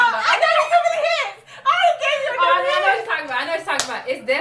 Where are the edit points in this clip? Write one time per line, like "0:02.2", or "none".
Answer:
none